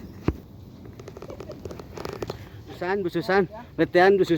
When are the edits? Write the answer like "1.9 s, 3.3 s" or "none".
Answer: 3.0 s